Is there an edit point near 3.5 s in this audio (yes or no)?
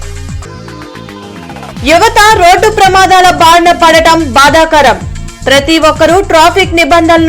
no